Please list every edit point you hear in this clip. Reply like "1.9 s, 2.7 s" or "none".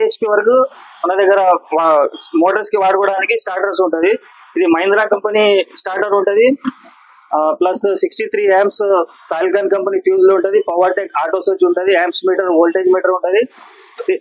none